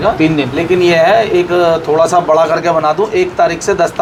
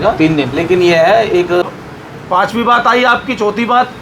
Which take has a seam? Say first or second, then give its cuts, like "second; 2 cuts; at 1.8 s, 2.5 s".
second; 1 cut; at 1.6 s